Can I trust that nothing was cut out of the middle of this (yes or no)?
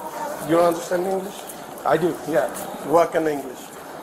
yes